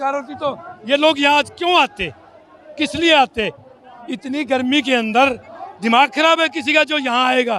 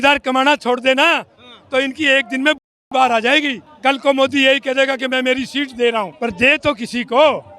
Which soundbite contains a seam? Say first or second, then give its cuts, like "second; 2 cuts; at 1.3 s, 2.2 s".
second; 2 cuts; at 3.7 s, 6.1 s